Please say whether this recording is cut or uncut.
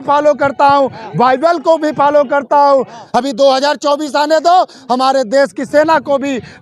cut